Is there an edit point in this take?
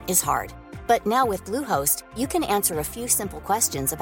no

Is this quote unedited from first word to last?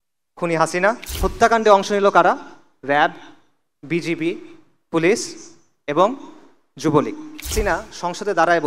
no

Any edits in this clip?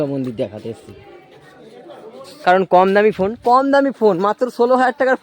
yes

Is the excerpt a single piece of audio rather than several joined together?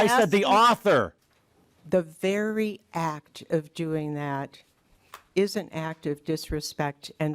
no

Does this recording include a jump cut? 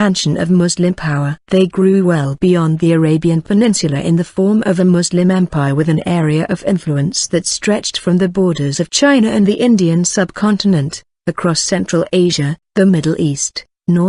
yes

